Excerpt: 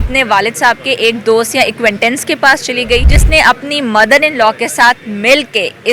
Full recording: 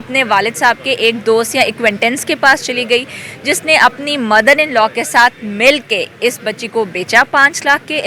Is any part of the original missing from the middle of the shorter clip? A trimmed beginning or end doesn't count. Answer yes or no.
yes